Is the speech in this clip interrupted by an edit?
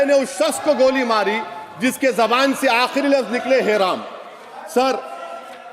no; 0 cuts

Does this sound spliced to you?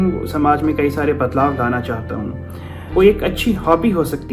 yes; 1 cut; at 2.8 s

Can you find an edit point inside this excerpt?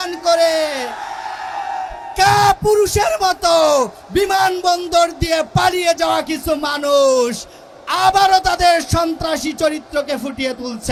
no; 0 cuts

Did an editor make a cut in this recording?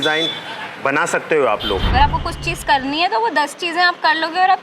yes; 1 cut; at 1.9 s

